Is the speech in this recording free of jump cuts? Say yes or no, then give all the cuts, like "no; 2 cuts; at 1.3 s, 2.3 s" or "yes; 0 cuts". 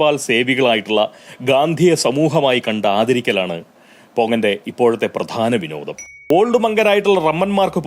no; 1 cut; at 6.1 s